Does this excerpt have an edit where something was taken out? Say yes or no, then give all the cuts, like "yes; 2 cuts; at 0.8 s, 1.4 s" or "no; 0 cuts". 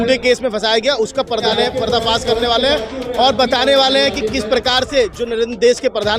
yes; 1 cut; at 1.4 s